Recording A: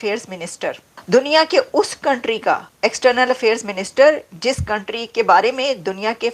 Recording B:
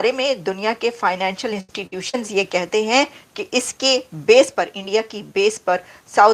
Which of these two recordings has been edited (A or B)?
A